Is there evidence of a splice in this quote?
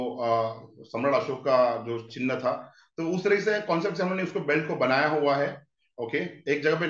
no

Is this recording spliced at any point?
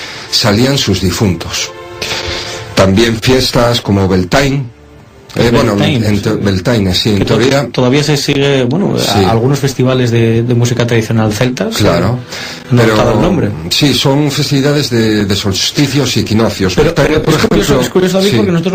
yes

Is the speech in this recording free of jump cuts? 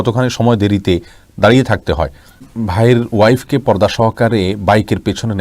no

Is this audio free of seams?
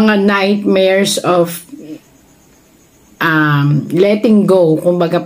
yes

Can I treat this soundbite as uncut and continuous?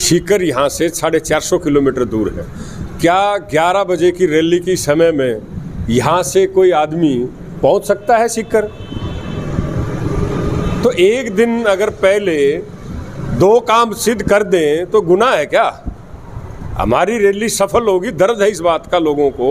yes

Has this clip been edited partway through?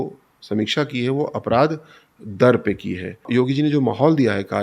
yes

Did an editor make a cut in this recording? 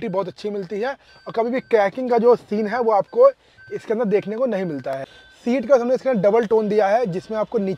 yes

